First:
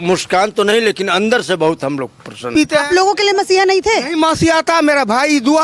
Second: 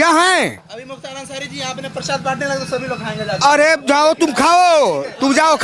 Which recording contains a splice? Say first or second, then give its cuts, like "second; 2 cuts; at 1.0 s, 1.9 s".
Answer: first; 1 cut; at 2.5 s